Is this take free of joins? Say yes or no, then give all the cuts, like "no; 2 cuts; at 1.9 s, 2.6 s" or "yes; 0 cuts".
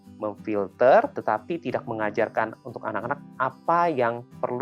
no; 1 cut; at 1.1 s